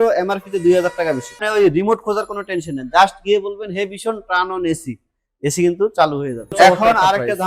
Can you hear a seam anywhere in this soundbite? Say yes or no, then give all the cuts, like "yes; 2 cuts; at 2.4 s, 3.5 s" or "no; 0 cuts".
yes; 2 cuts; at 1.4 s, 6.5 s